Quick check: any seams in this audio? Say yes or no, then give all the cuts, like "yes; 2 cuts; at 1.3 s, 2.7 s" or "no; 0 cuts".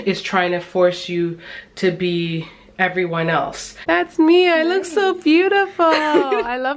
yes; 1 cut; at 3.7 s